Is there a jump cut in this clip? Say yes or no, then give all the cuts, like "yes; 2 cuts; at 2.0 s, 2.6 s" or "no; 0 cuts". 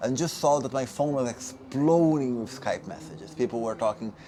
no; 0 cuts